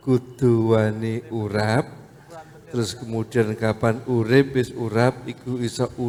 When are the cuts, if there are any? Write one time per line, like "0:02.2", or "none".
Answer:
none